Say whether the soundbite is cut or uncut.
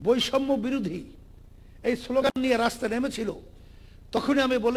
uncut